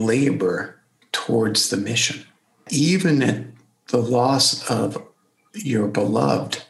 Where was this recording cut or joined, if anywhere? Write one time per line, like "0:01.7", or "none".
0:02.6